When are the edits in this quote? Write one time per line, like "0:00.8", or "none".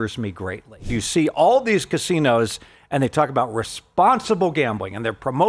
0:01.0